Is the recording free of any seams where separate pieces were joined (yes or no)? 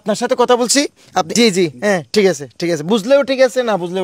no